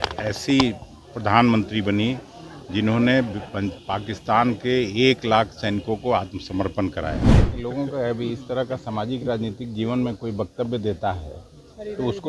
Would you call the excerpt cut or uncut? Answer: cut